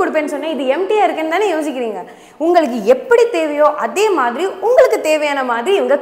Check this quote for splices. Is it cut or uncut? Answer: uncut